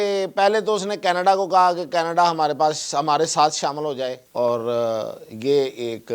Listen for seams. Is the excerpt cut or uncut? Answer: cut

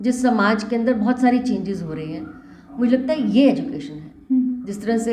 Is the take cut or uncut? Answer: cut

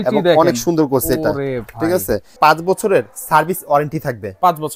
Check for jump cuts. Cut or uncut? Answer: cut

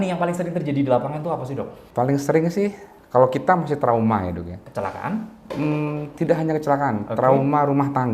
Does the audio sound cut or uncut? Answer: cut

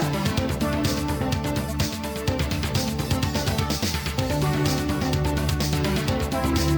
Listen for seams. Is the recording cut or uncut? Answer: uncut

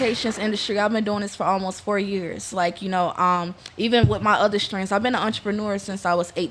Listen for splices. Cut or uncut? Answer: uncut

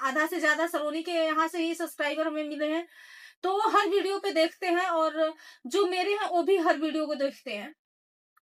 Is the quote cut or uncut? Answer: uncut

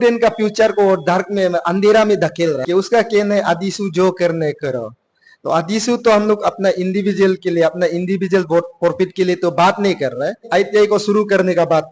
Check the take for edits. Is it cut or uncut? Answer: cut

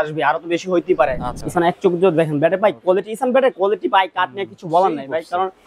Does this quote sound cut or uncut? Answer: cut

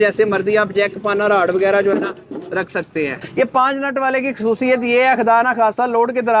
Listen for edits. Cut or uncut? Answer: cut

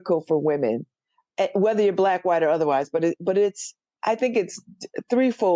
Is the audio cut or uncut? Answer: cut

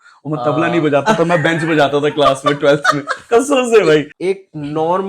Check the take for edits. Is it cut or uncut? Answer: cut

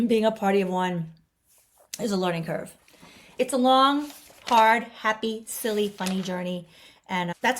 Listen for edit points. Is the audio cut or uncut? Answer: cut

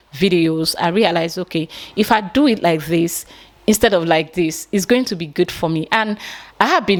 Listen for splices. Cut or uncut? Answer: uncut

